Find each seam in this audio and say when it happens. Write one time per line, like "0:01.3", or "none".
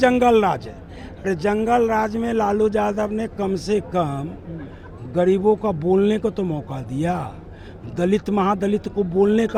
none